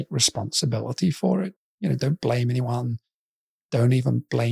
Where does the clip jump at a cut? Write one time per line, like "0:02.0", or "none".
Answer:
0:01.7